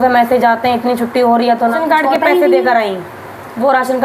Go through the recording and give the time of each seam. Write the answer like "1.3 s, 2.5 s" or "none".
1.8 s